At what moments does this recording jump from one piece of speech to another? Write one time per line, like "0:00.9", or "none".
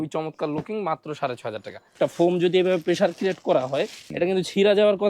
0:02.0
0:04.0